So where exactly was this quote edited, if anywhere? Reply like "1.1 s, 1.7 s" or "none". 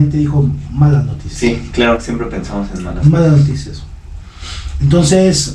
none